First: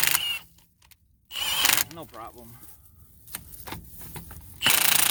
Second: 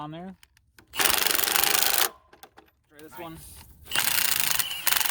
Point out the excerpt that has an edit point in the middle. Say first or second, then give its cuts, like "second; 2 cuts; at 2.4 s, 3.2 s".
second; 1 cut; at 3.2 s